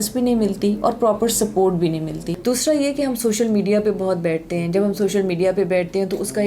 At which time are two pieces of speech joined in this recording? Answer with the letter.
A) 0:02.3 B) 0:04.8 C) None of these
A